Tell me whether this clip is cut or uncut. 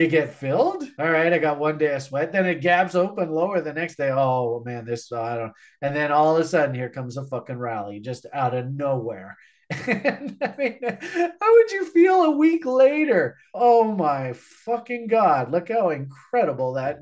uncut